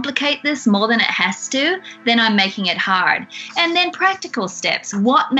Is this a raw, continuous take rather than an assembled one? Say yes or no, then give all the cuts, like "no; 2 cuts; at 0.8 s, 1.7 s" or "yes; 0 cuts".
no; 1 cut; at 3.4 s